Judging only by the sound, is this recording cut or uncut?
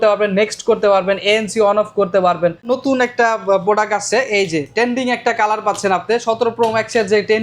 cut